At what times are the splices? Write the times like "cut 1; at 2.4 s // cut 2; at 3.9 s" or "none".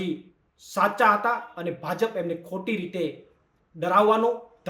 none